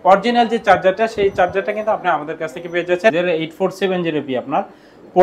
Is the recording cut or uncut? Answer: cut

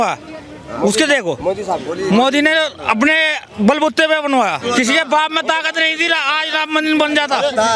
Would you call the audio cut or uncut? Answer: cut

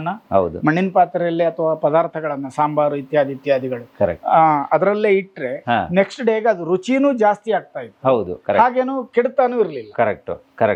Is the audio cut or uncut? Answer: uncut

